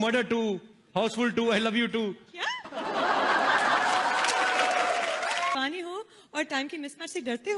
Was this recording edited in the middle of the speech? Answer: yes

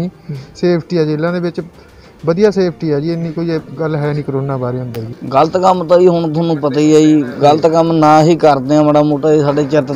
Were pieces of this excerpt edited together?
yes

